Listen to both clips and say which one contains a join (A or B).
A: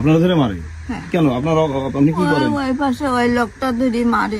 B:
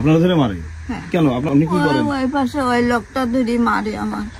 B